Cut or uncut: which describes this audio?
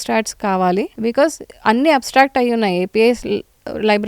cut